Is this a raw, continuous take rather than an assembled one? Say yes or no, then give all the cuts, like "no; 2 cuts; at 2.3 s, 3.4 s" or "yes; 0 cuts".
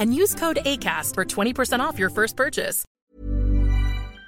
no; 1 cut; at 2.8 s